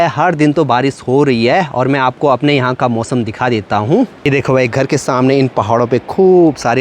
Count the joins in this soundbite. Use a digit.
1